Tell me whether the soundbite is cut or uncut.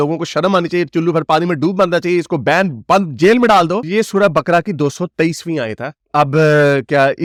uncut